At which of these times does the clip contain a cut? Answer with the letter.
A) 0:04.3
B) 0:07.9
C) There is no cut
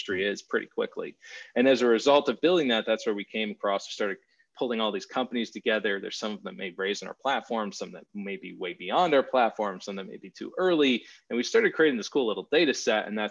C